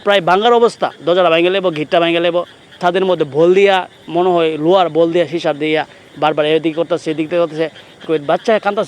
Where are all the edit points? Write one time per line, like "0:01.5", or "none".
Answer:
0:02.8
0:08.0